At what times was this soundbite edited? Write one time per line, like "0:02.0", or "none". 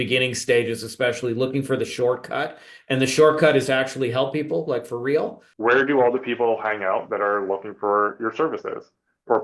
0:05.4